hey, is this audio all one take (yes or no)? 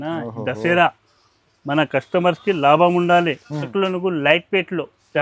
no